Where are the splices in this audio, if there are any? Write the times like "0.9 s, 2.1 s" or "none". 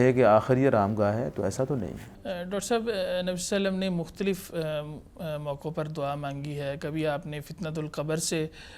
none

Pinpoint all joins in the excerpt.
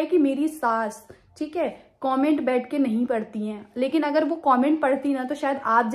none

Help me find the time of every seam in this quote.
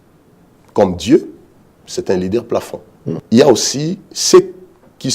3.2 s

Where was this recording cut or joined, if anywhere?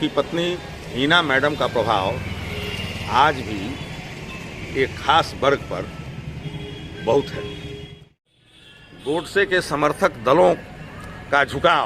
8.4 s

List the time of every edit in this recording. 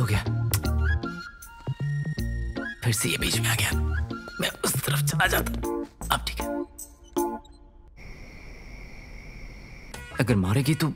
7.8 s, 10.0 s

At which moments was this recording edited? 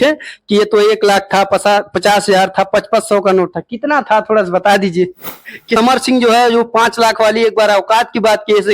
5.8 s

